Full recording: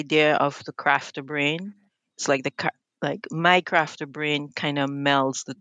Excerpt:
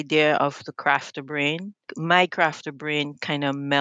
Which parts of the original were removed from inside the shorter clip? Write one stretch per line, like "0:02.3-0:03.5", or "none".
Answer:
0:01.9-0:03.2